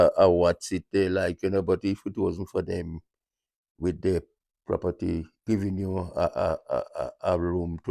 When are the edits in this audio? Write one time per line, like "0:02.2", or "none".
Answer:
0:05.3